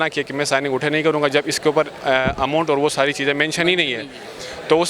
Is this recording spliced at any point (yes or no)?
no